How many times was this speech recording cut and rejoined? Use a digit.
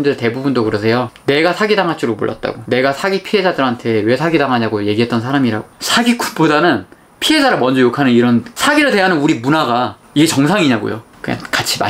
2